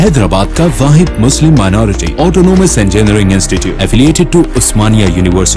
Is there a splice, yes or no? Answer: no